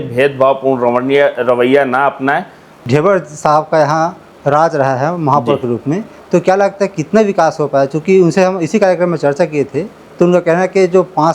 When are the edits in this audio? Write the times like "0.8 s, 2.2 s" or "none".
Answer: 2.8 s